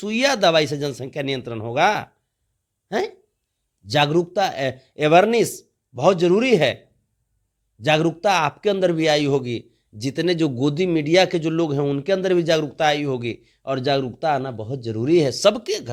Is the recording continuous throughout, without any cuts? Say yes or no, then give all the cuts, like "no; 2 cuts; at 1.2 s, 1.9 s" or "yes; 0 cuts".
yes; 0 cuts